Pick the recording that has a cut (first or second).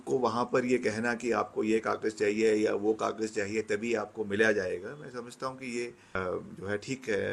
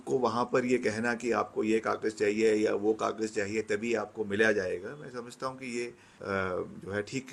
first